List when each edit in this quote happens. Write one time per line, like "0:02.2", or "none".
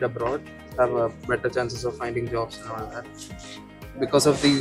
none